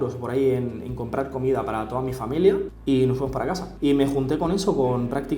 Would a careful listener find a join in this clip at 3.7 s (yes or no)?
yes